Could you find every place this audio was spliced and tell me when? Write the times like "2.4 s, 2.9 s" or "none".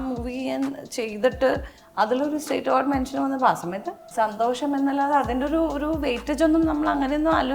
4.0 s